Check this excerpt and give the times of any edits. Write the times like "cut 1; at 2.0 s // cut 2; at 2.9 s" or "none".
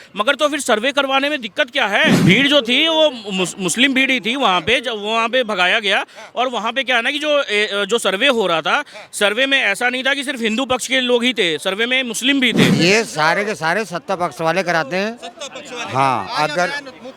cut 1; at 2.2 s // cut 2; at 12.7 s